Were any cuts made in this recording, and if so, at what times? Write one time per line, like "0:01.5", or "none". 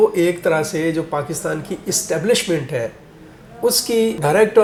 none